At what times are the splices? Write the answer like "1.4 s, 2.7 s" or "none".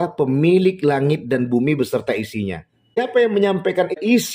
3.0 s

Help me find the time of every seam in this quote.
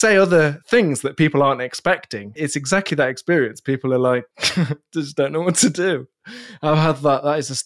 2.3 s, 4.3 s

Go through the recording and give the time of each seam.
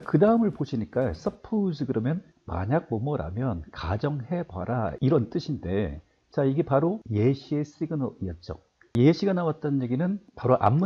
none

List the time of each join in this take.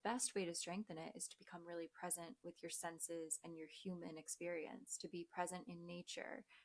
none

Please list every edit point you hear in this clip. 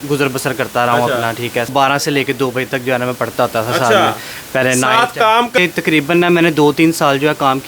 1.7 s, 5.6 s

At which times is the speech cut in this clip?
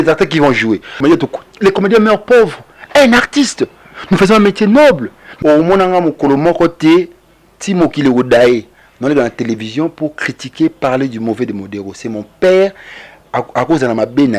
1.0 s, 5.2 s

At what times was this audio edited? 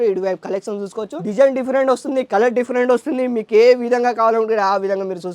1.2 s

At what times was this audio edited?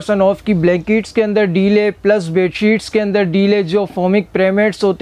none

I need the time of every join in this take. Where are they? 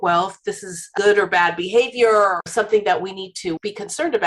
0.9 s, 2.5 s

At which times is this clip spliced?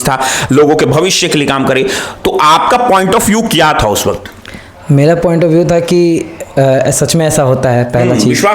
none

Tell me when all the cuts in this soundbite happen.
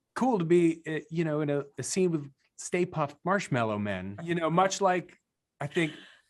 4.1 s

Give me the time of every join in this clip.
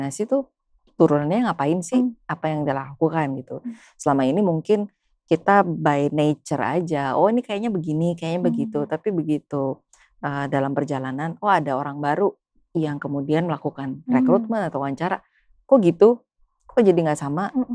none

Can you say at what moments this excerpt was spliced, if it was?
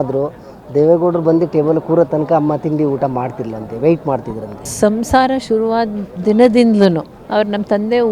4.6 s, 7.1 s

